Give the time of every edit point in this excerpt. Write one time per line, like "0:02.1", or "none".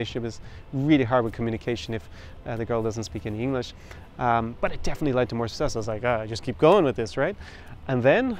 none

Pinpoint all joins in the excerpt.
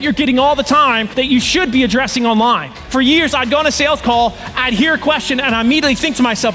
0:01.0
0:02.7

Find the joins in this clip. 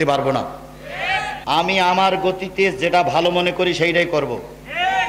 0:01.4

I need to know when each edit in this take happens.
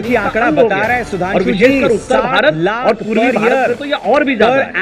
none

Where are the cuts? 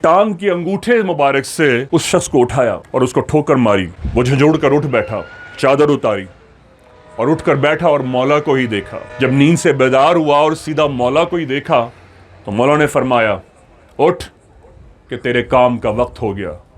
0:04.0

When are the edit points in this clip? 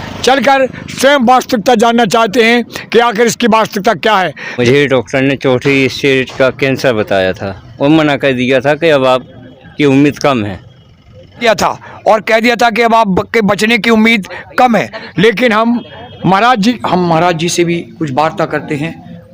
0:04.6
0:11.4
0:16.8

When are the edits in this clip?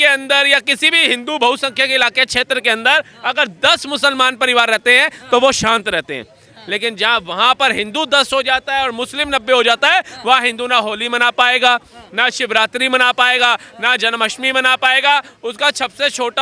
none

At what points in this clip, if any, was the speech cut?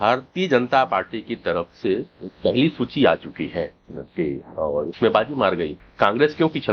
0:05.8

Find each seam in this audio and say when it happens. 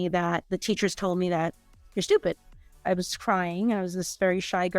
0:02.8

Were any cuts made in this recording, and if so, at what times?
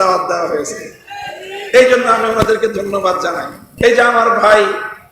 0:03.7

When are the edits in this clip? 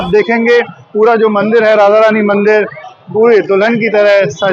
none

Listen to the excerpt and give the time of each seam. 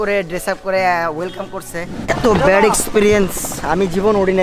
0:02.0

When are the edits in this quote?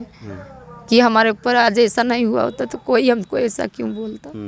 none

